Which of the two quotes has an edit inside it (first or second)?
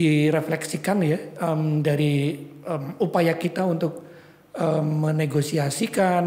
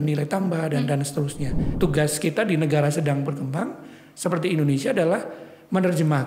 second